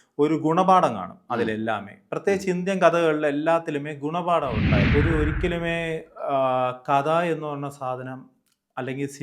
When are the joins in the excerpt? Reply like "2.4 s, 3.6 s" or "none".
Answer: 4.9 s